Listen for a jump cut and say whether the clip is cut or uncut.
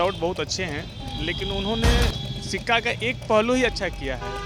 uncut